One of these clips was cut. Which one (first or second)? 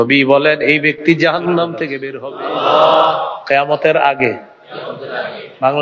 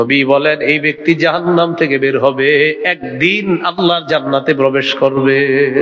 first